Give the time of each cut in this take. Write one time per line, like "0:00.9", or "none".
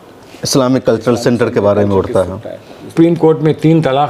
0:02.9